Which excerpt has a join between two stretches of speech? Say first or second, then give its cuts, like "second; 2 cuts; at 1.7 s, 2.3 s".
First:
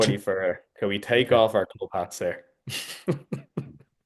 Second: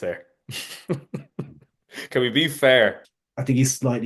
second; 1 cut; at 3.0 s